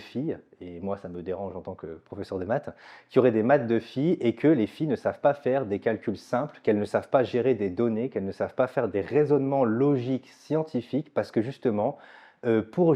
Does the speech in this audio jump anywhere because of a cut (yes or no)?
no